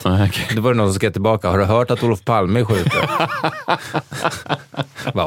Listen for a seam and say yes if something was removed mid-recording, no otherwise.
no